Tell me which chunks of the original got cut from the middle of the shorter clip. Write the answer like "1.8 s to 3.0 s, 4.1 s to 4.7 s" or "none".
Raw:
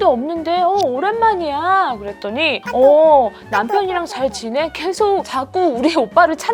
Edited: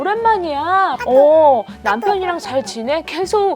2.0 s to 2.7 s